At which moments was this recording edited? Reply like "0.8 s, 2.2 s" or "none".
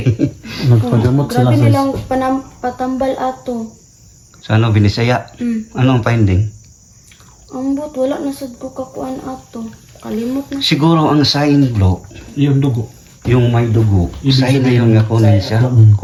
none